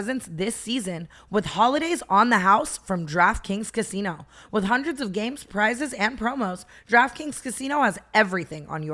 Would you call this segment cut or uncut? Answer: uncut